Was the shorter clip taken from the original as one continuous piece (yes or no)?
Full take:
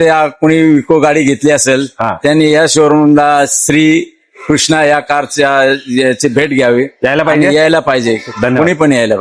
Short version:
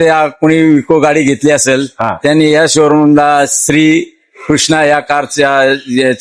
yes